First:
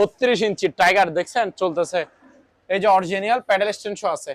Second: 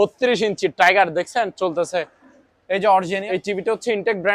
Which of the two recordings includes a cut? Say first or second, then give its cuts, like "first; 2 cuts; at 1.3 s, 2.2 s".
second; 1 cut; at 3.2 s